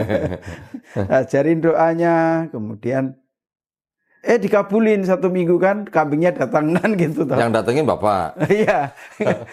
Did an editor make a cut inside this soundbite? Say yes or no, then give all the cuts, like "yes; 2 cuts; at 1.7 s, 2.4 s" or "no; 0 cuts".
no; 0 cuts